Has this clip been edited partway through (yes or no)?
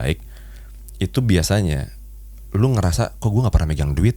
no